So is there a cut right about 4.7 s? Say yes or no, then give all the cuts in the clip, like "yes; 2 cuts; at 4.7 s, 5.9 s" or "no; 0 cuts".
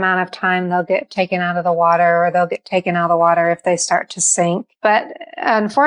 yes; 1 cut; at 4.7 s